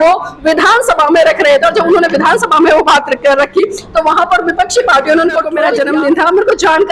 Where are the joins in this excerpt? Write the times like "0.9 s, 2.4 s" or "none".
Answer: 5.6 s